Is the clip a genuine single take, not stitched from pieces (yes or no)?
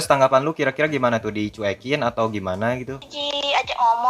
no